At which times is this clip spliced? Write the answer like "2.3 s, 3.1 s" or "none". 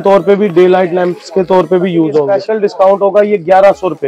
2.4 s